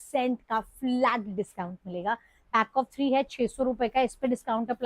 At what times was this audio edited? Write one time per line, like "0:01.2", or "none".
0:02.3